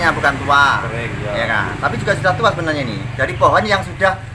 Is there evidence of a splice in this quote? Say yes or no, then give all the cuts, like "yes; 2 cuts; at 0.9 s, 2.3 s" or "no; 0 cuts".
no; 0 cuts